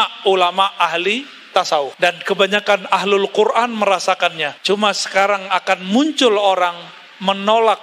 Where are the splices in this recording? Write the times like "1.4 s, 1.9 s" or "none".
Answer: 1.9 s, 4.5 s